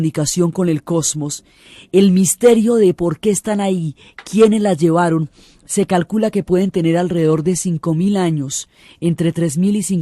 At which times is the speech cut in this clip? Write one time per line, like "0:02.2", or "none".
0:05.5